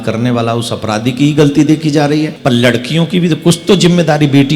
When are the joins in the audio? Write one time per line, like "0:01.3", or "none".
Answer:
0:02.3